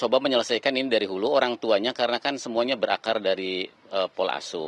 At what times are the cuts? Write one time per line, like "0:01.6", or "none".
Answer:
none